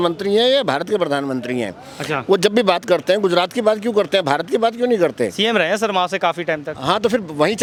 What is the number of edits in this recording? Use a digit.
0